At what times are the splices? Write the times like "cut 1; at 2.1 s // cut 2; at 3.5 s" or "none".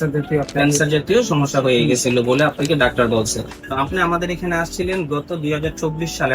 cut 1; at 3.6 s